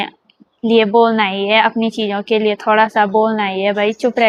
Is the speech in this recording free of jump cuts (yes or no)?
yes